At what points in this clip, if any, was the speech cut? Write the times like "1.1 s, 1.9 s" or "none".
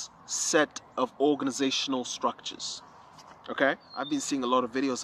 3.9 s